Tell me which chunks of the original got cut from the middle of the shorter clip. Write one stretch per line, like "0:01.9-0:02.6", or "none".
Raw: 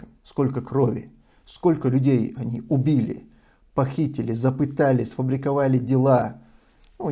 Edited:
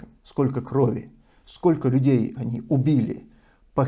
none